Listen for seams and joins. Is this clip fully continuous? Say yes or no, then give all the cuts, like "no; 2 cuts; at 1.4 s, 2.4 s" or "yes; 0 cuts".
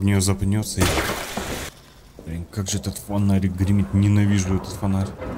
no; 1 cut; at 1.7 s